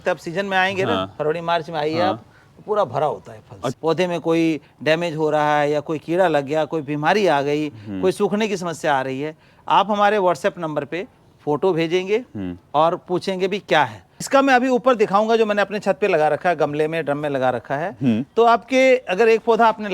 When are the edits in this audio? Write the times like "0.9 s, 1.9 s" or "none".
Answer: 3.7 s, 14.3 s